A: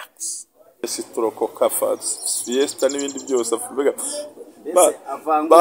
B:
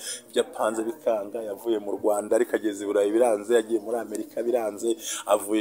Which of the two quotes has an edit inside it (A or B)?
A